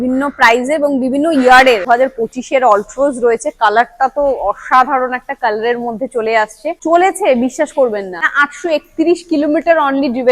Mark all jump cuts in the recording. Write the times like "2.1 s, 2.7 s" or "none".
1.8 s, 6.7 s